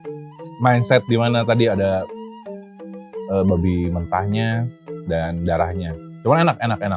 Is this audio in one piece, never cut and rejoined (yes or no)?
yes